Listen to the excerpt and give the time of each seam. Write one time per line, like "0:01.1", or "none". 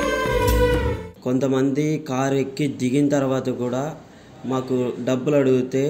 0:01.1

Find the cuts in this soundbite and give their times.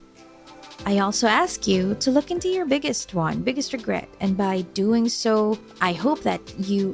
0:05.7

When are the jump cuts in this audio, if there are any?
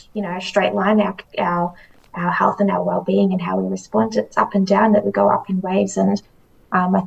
none

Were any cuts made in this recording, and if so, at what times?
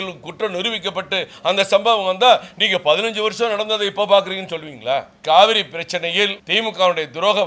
0:05.2
0:06.4

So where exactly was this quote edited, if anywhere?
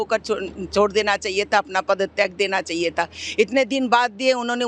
none

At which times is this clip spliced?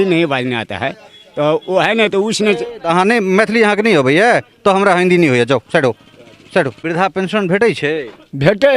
0:06.8

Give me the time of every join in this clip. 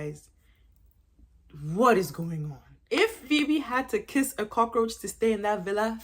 0:02.8

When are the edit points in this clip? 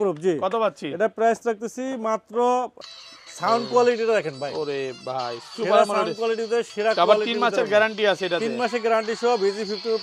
0:02.7

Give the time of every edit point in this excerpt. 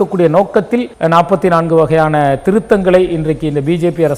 0:00.9

